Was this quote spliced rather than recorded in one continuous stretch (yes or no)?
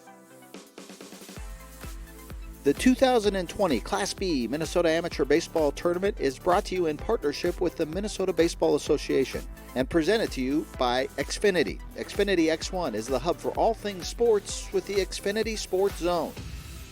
yes